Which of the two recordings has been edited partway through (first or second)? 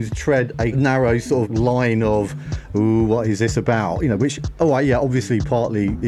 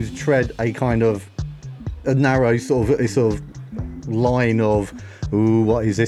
first